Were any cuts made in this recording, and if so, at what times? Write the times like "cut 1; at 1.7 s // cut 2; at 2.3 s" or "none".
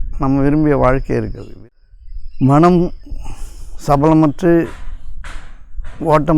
cut 1; at 1.4 s